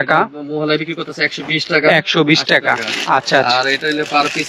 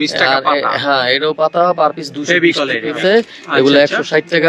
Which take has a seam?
second; 1 cut; at 2.9 s

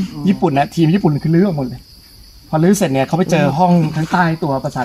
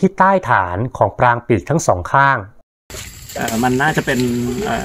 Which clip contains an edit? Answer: second; 1 cut; at 2.7 s

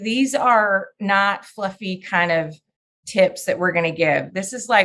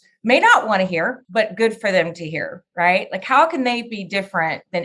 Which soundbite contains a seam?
second; 1 cut; at 1.2 s

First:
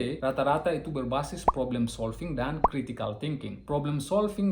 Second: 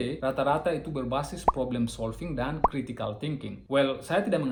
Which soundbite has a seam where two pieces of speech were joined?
first; 1 cut; at 3.6 s

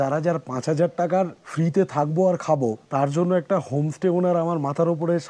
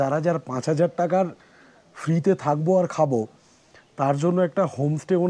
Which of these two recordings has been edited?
first; 2 cuts; at 1.4 s, 2.8 s

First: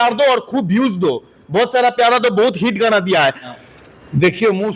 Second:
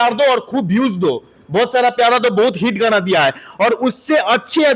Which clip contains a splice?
first; 1 cut; at 3.5 s

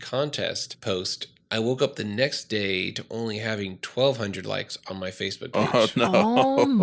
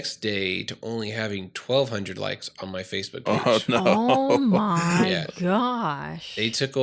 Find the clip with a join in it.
first; 1 cut; at 1.1 s

